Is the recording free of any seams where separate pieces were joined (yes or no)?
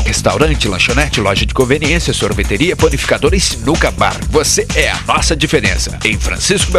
yes